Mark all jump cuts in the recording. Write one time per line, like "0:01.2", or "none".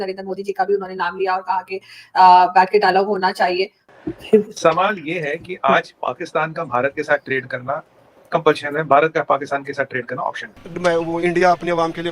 0:03.8
0:10.5

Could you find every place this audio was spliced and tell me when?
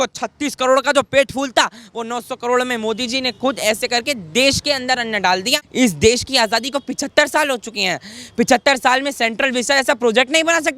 0:05.6

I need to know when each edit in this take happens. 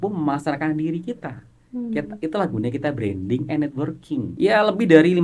0:04.3

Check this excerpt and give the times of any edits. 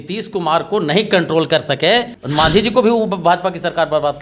0:02.6

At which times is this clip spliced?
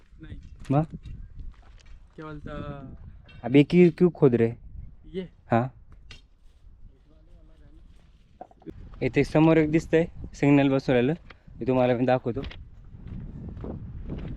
0:08.7

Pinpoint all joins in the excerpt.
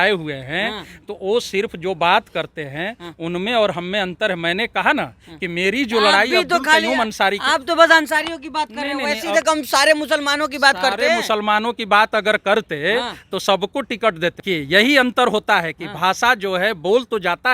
0:14.4

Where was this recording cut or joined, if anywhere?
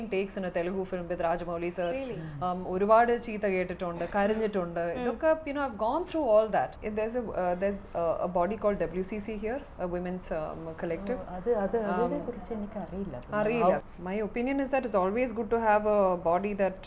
0:06.8
0:13.8

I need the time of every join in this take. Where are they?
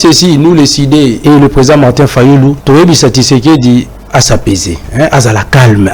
0:01.2
0:02.6
0:04.8

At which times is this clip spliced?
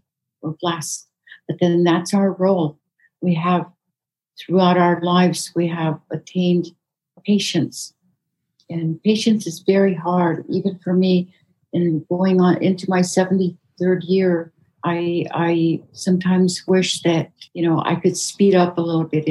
none

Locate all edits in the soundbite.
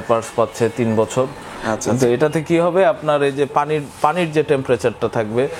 0:01.5

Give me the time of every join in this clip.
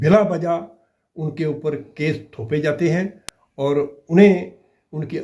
none

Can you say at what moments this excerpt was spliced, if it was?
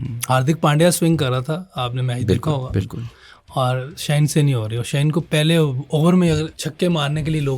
0:05.3
0:06.6

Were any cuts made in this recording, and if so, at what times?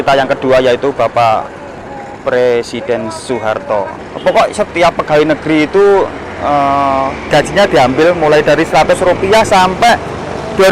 0:04.0

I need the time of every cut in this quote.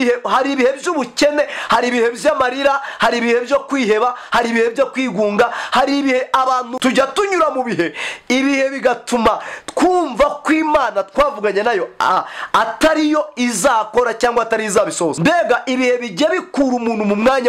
0:06.7
0:15.2

